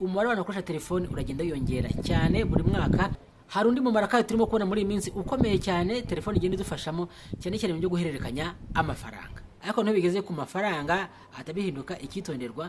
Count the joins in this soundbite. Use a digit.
2